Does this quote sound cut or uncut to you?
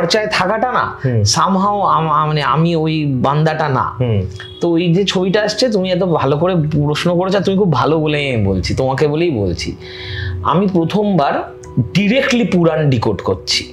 uncut